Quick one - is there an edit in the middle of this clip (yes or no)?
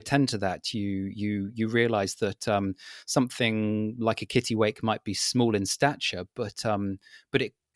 no